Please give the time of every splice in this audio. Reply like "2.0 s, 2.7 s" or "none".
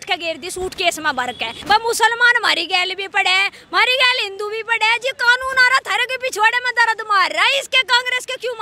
1.5 s